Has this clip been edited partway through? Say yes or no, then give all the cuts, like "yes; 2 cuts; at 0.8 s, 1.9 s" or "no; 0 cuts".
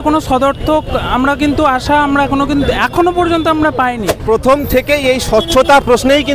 yes; 1 cut; at 4.1 s